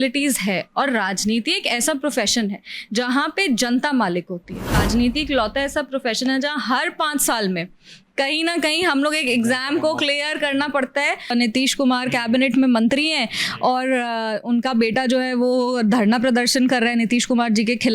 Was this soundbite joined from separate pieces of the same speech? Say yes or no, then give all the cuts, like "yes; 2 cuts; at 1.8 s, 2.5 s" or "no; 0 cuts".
yes; 2 cuts; at 4.7 s, 11.3 s